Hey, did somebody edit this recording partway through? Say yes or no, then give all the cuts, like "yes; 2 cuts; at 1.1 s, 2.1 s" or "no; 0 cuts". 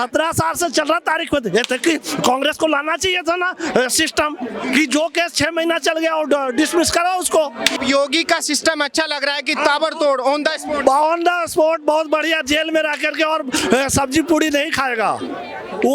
yes; 1 cut; at 7.8 s